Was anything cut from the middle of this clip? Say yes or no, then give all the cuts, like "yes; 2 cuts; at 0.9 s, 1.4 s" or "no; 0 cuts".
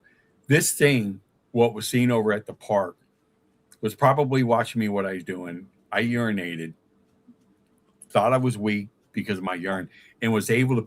no; 0 cuts